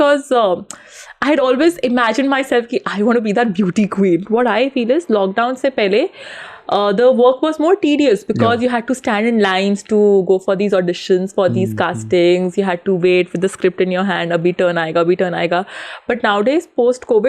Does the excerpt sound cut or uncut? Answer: cut